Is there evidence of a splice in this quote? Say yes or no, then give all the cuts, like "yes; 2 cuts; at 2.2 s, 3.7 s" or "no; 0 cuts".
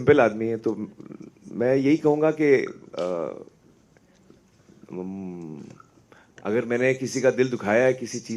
no; 0 cuts